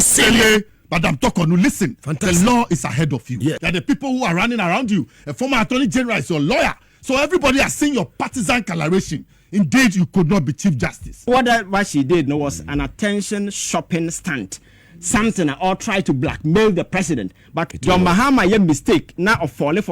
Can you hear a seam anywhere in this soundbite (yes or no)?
yes